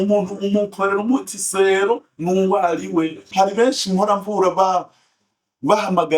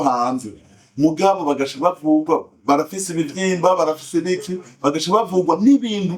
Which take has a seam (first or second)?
first